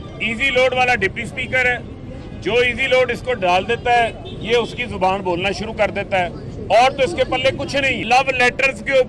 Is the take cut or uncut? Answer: cut